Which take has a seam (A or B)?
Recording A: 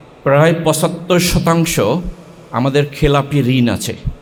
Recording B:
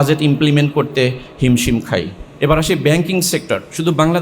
B